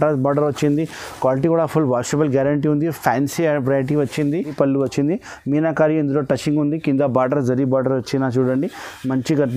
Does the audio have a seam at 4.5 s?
yes; 1 cut; at 4.5 s

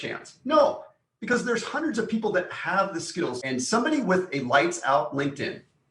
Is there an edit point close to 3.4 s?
yes; 1 cut; at 3.4 s

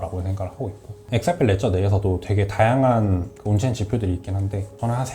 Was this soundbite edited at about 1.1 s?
yes; 1 cut; at 1.1 s

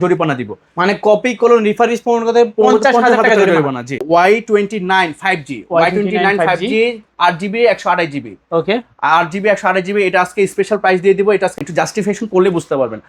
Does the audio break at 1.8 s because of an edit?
no; 2 cuts; at 4.0 s, 11.6 s

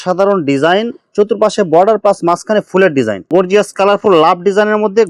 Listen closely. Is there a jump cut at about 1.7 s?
no; 1 cut; at 3.2 s

